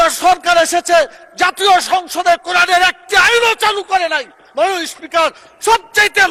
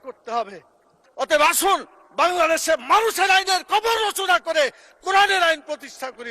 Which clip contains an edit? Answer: second; 1 cut; at 1.0 s

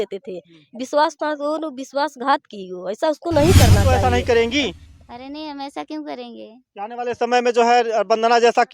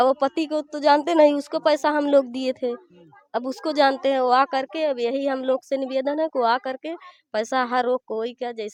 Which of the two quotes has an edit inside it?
first; 1 cut; at 3.8 s

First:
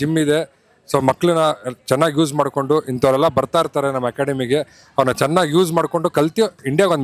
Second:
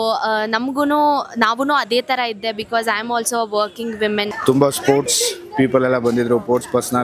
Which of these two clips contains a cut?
second; 1 cut; at 4.3 s

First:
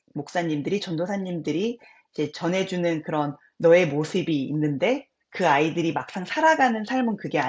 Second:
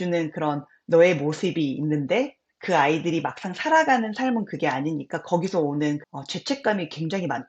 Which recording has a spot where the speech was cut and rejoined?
second; 1 cut; at 6.0 s

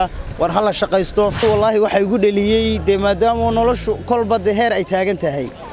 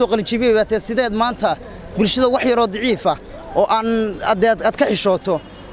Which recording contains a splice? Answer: first; 1 cut; at 1.4 s

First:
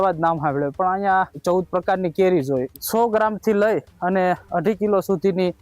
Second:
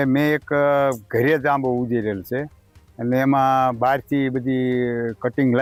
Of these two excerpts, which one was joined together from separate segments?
first; 2 cuts; at 1.4 s, 2.8 s

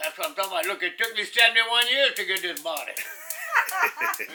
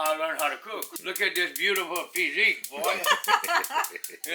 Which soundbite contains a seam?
second; 1 cut; at 0.9 s

